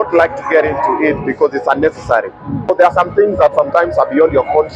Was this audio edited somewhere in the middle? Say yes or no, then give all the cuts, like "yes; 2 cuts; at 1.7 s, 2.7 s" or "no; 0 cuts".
yes; 1 cut; at 2.7 s